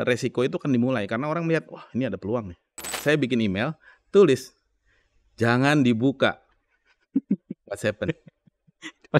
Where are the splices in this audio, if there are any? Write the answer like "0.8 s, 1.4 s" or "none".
2.9 s